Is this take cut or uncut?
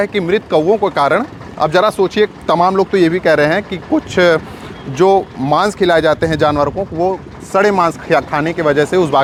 uncut